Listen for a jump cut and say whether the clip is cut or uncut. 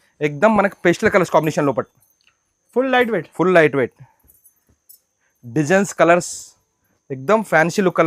uncut